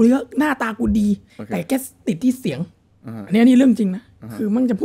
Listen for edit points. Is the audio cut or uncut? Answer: uncut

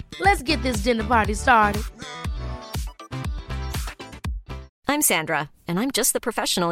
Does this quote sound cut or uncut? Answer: cut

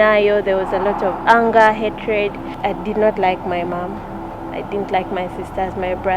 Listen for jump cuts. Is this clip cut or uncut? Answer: cut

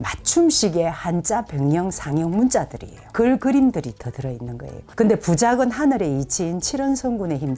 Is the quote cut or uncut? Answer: uncut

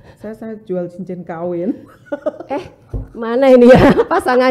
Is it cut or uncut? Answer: uncut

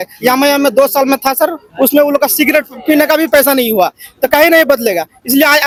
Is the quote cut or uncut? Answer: uncut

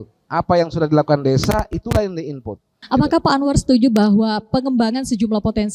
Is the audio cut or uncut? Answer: cut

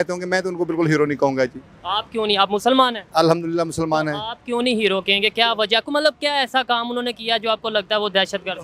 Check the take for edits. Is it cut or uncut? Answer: uncut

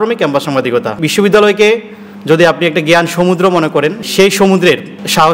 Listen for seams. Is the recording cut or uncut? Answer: cut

